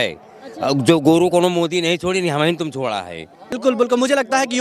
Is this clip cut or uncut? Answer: cut